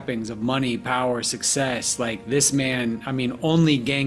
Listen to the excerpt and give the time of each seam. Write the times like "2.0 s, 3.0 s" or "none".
none